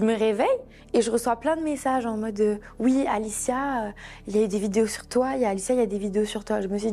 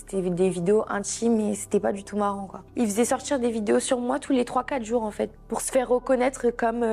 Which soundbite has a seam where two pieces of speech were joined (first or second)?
second